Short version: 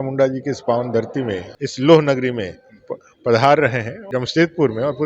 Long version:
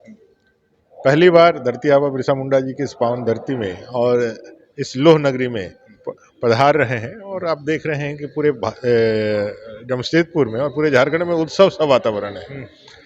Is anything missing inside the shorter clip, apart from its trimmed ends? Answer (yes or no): yes